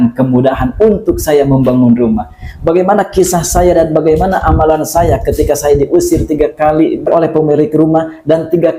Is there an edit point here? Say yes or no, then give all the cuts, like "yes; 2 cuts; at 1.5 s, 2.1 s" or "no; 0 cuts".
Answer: no; 0 cuts